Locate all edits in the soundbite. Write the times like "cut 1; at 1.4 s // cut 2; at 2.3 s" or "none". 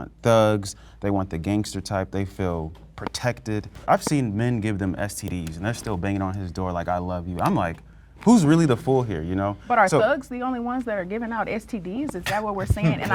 cut 1; at 3.8 s